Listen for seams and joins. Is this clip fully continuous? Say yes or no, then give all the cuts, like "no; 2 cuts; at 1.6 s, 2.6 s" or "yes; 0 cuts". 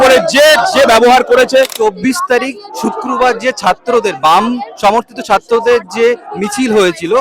no; 1 cut; at 1.7 s